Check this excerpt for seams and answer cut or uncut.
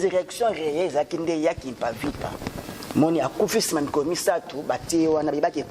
uncut